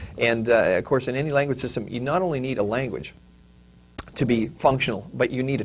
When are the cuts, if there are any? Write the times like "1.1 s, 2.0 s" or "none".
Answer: 2.8 s